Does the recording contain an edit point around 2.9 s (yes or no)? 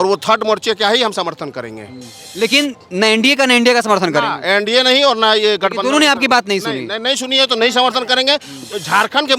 no